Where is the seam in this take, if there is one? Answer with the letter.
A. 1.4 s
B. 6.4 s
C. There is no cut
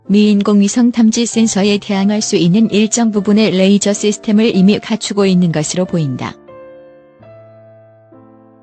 B